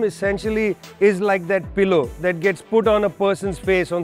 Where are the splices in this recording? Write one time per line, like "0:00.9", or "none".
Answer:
none